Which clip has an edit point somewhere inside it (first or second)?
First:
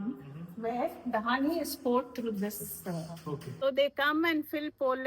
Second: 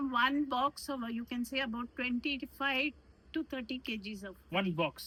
first